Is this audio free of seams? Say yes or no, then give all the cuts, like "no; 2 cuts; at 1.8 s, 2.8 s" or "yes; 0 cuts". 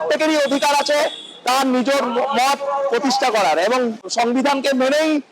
no; 1 cut; at 4.0 s